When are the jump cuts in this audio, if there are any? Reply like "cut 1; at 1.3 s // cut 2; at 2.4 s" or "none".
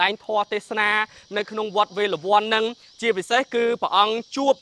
none